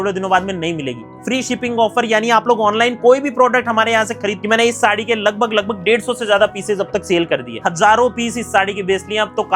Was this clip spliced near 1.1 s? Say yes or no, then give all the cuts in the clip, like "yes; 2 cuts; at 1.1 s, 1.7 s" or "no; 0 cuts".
yes; 3 cuts; at 1.1 s, 4.4 s, 7.6 s